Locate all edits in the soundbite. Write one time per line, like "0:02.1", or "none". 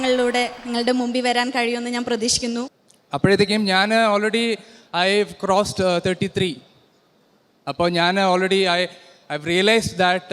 0:02.7